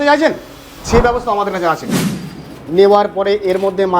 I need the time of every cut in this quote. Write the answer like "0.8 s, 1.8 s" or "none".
2.0 s